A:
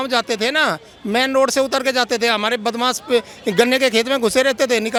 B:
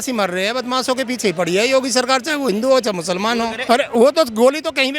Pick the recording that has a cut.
B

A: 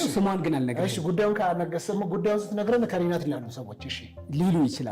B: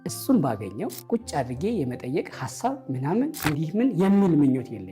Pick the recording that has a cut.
B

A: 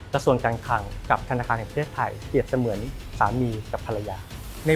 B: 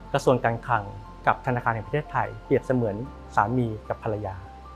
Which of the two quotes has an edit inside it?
A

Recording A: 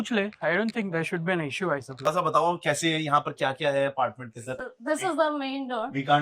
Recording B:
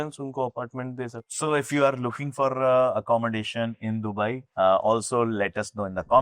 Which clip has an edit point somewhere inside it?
A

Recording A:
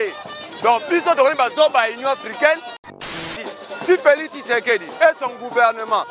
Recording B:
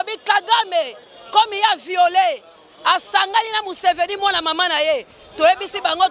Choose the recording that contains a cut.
A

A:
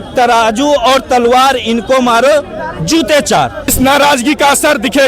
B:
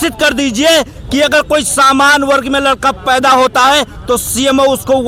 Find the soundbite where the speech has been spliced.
A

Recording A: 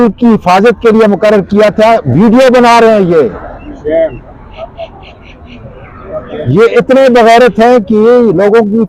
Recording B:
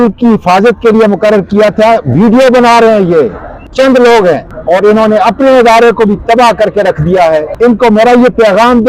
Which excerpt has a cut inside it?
B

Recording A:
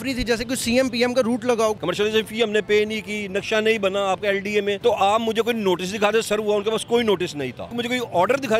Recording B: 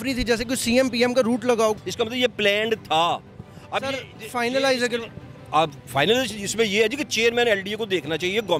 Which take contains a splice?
A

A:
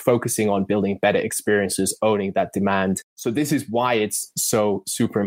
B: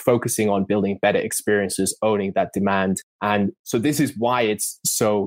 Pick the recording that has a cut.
A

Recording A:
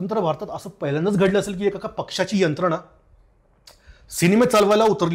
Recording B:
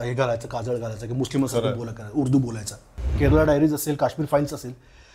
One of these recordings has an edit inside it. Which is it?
B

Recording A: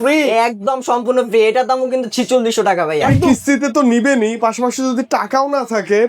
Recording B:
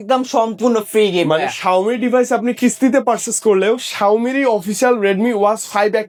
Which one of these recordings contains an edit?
A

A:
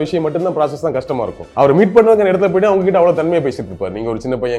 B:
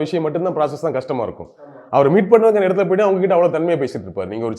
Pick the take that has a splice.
A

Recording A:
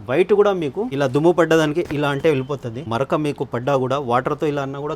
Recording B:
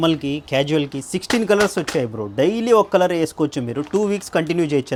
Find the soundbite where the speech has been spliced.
A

